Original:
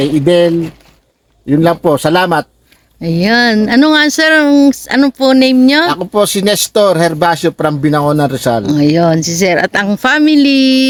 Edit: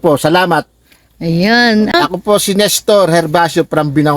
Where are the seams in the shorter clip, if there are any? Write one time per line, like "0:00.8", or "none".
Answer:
0:01.9